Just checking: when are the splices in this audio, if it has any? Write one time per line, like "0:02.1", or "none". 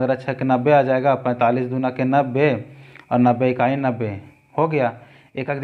none